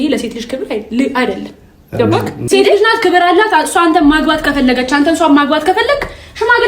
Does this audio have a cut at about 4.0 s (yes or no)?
no